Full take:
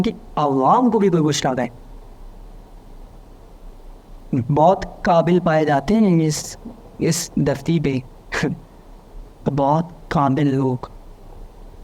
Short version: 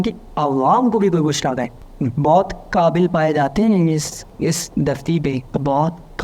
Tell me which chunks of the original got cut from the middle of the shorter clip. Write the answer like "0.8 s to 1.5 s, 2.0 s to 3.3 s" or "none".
1.8 s to 4.1 s, 6.5 s to 6.8 s, 8.1 s to 9.4 s